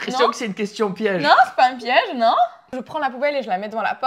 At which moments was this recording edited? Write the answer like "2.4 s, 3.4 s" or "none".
2.7 s

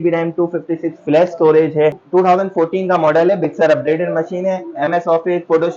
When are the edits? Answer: 2.0 s

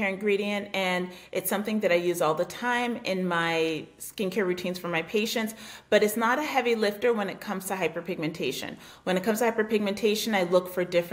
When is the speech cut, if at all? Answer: none

